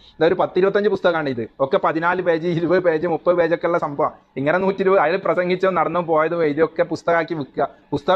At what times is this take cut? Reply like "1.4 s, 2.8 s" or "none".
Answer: none